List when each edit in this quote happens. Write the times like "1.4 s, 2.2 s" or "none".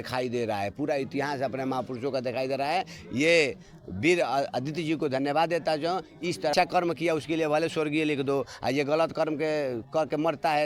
6.5 s